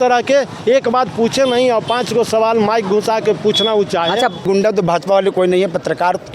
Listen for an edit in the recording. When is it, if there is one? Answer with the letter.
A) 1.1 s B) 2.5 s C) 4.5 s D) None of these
C